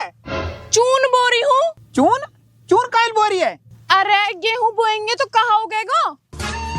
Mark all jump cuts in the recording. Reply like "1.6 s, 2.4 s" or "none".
1.8 s